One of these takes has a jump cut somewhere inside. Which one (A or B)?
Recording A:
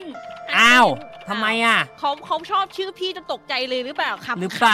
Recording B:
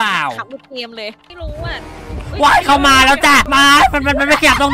B